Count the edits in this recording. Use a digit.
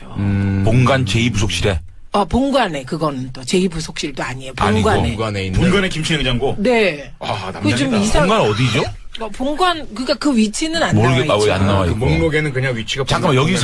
1